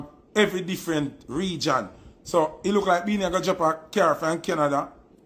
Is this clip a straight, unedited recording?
yes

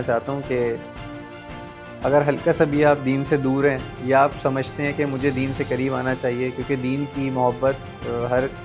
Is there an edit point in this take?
no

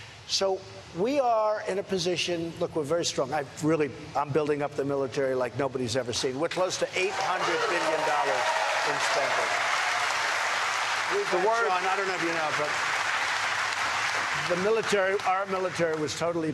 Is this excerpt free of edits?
yes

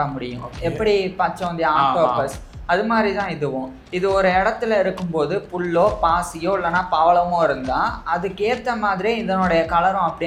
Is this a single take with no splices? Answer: yes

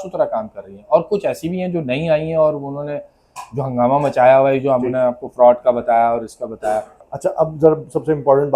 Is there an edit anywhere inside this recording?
yes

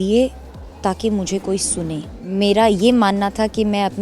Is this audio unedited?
no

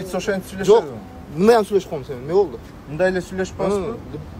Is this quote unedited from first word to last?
yes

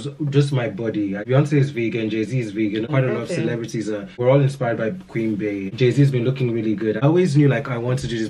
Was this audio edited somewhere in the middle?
yes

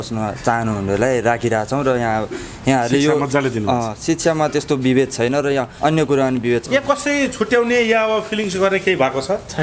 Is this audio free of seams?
no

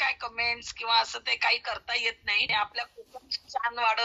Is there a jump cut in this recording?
yes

